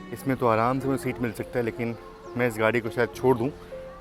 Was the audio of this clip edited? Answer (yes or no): no